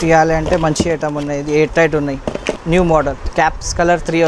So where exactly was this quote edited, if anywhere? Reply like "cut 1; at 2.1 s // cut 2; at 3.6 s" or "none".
cut 1; at 2.6 s // cut 2; at 3.2 s